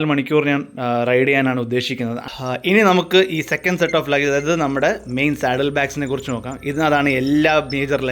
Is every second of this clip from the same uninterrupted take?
no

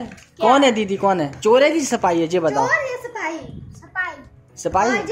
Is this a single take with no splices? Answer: yes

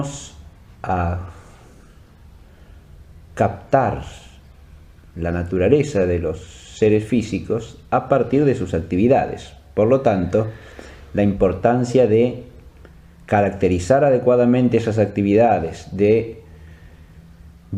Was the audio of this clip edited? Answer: no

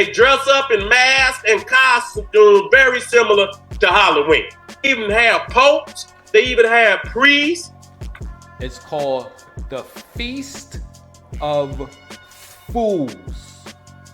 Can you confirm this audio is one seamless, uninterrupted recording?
no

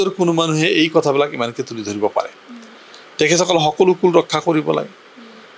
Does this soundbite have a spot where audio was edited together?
no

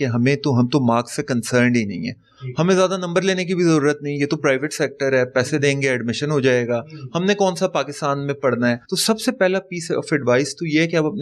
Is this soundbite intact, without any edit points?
yes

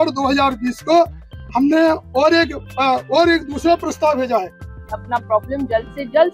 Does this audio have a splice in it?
yes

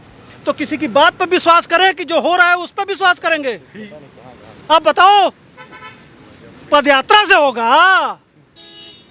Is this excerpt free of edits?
yes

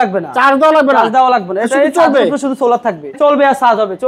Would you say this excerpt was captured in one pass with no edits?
no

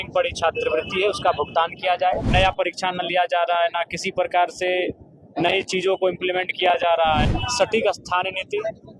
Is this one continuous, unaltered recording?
no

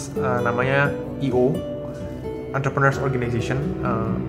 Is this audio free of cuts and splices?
yes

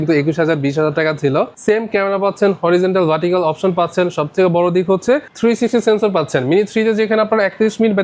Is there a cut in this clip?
yes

